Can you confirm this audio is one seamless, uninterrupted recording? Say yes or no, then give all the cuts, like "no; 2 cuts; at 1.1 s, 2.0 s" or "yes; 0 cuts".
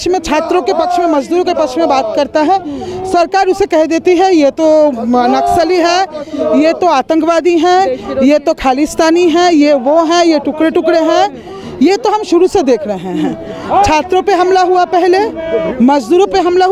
yes; 0 cuts